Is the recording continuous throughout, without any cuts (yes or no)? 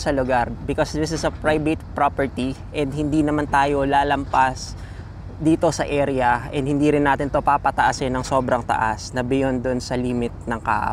yes